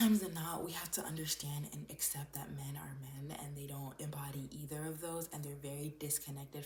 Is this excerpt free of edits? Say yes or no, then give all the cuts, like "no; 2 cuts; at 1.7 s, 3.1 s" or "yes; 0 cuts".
yes; 0 cuts